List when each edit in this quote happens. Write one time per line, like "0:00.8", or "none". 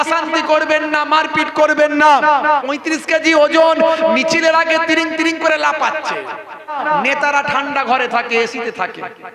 0:02.6
0:06.8